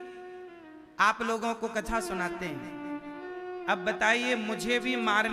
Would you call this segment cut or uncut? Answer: cut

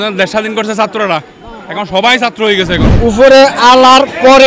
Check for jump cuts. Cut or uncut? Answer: cut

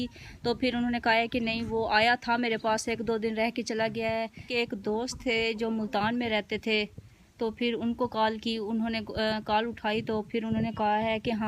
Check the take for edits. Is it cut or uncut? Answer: cut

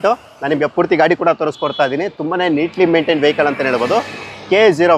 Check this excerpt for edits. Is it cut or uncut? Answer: uncut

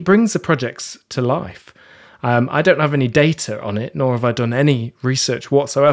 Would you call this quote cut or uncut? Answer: uncut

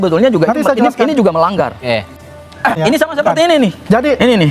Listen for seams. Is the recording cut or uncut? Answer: cut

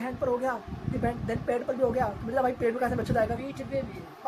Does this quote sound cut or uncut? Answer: uncut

